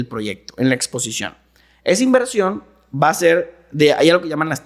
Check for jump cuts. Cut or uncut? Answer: uncut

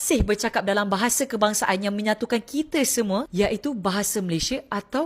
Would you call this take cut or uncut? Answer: uncut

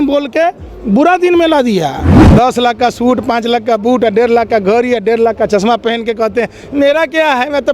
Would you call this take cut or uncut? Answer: cut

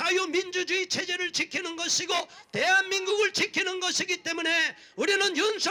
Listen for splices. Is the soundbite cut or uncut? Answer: uncut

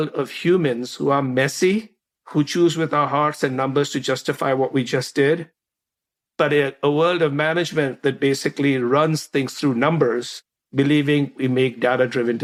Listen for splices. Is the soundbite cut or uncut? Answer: uncut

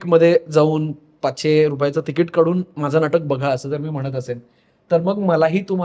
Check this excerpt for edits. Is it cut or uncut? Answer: uncut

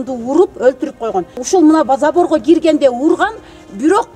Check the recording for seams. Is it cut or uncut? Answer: cut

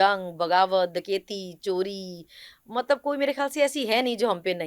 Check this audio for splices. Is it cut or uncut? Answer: uncut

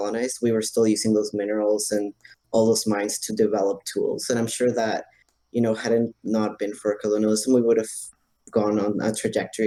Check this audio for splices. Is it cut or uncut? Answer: uncut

